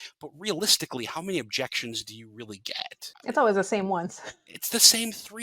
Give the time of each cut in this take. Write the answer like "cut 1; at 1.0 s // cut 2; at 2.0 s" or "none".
cut 1; at 3.1 s